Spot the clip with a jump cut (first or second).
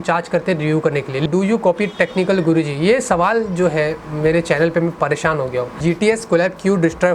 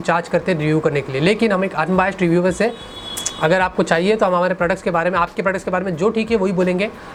first